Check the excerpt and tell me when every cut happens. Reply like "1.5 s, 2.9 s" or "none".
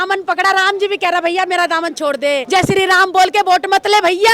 2.4 s